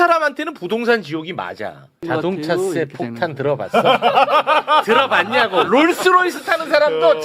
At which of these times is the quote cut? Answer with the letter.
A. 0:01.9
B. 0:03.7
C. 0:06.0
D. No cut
A